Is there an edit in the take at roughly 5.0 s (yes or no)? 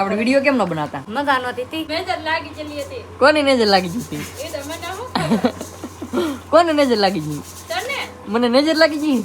no